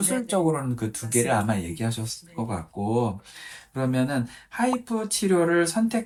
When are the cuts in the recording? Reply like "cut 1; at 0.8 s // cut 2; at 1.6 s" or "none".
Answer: none